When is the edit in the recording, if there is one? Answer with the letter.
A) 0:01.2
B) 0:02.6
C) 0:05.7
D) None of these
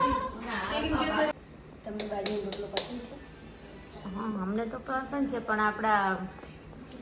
A